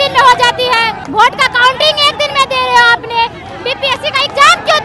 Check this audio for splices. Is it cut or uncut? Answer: cut